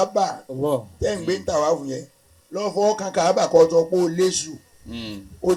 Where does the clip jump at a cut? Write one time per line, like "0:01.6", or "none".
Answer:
none